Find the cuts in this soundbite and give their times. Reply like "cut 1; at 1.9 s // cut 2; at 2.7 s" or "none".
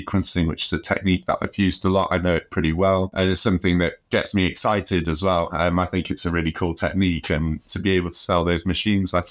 cut 1; at 3.1 s